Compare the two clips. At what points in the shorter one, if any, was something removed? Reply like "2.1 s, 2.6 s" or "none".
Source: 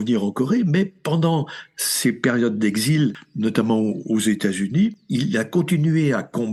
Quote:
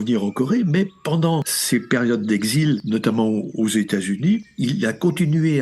1.5 s, 2.8 s

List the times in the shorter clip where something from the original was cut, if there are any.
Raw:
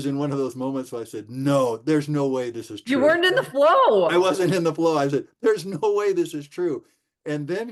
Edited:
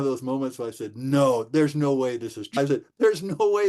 2.6 s

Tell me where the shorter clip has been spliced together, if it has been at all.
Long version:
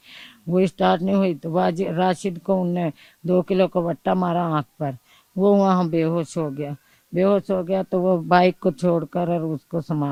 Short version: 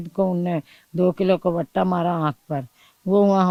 none

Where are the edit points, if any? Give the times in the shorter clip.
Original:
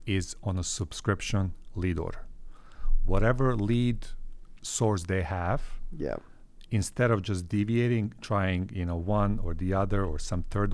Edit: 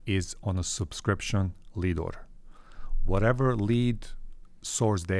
none

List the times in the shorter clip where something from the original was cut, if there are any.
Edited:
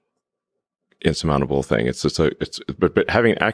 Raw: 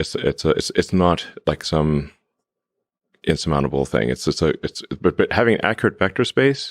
none

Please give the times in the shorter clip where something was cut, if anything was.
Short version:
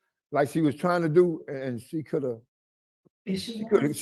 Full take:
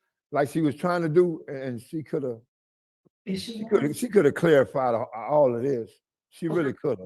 none

